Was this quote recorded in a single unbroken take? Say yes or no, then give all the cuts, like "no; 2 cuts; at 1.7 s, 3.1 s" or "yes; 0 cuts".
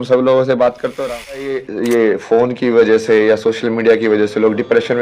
no; 1 cut; at 1.7 s